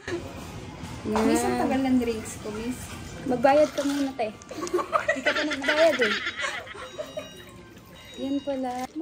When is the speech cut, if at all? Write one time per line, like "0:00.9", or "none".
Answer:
none